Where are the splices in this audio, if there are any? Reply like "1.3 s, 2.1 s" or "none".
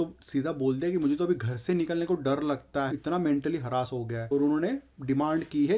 2.9 s, 4.2 s